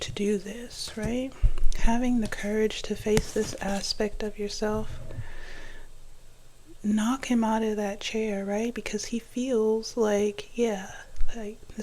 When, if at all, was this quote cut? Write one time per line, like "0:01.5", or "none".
none